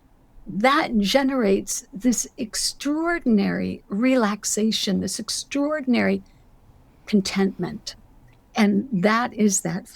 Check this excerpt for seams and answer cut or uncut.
uncut